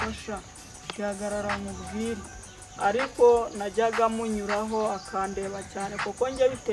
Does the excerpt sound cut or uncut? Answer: cut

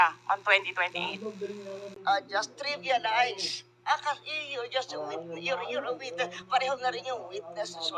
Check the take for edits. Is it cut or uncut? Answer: cut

